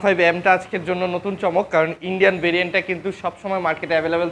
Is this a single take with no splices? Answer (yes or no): yes